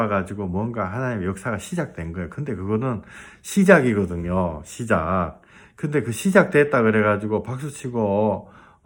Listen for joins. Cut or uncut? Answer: uncut